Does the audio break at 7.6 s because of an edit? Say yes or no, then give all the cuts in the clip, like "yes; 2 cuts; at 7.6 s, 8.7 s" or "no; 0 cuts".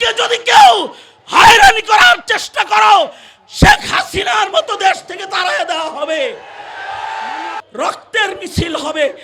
yes; 1 cut; at 7.6 s